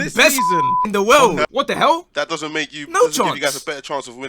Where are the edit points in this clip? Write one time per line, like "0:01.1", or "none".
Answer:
0:01.5